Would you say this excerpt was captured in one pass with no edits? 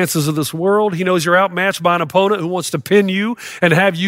yes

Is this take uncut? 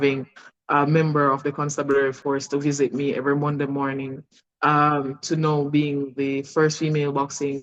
yes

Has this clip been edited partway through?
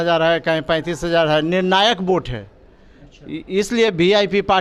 no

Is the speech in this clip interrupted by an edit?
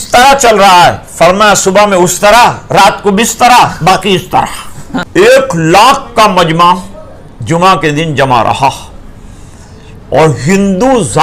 yes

